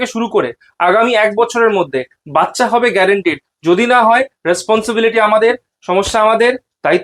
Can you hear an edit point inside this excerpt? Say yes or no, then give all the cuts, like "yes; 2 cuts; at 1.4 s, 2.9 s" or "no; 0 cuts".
no; 0 cuts